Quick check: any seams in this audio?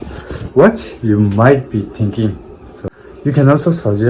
yes; 1 cut; at 2.9 s

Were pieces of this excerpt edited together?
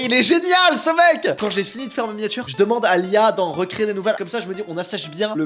yes; 2 cuts; at 1.3 s, 4.2 s

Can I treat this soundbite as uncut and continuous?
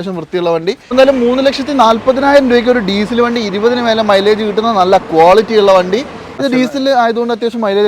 no; 2 cuts; at 0.9 s, 6.2 s

